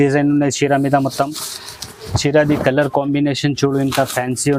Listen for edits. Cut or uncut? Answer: uncut